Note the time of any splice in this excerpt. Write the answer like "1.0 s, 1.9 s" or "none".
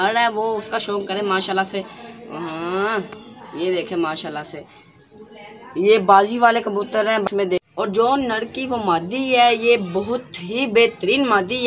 7.2 s